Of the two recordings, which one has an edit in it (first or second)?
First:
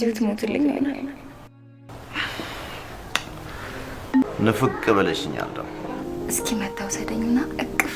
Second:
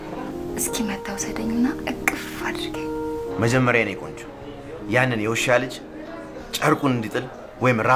first